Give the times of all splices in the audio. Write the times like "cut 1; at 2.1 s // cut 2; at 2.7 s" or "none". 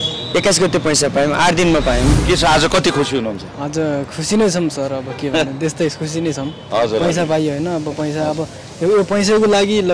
cut 1; at 2.2 s